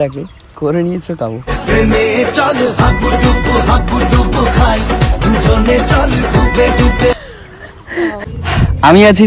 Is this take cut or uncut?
cut